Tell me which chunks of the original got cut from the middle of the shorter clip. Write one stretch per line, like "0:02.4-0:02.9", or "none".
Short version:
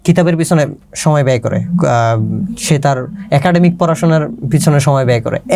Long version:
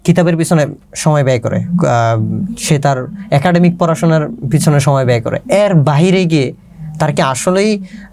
none